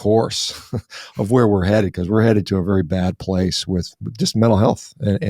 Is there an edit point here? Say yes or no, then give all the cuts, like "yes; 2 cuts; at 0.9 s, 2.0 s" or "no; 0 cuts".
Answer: no; 0 cuts